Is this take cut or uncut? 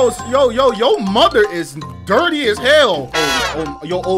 cut